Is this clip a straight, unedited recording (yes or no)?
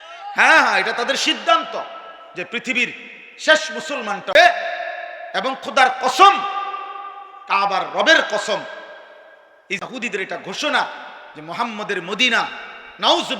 no